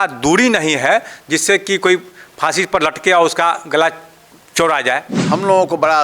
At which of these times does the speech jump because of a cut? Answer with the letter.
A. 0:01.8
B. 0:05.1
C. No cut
B